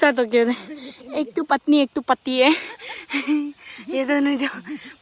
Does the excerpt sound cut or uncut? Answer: uncut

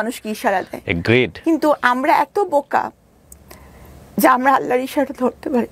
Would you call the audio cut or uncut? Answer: uncut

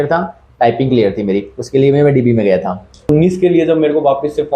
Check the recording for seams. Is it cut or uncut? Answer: cut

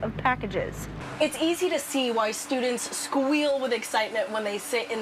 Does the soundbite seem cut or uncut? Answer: cut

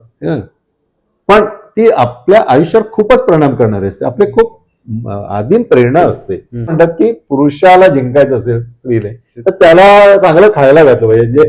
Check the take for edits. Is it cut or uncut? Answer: cut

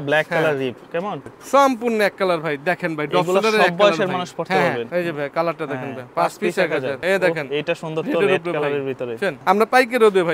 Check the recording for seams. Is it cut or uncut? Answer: cut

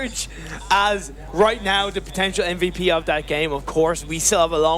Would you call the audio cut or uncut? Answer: cut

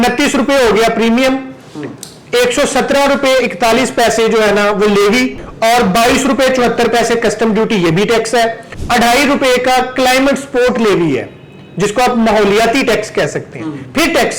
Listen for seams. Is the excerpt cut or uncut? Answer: cut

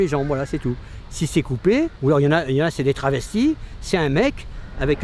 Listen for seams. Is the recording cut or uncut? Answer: cut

